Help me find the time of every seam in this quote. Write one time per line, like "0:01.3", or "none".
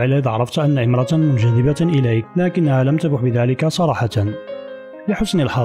0:02.3